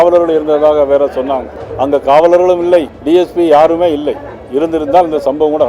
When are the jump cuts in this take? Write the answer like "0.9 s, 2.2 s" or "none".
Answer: 1.6 s, 2.9 s